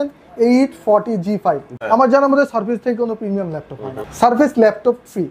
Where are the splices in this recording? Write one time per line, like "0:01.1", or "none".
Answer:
0:01.7
0:04.0